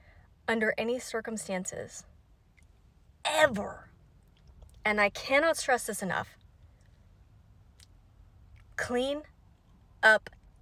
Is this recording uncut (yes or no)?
yes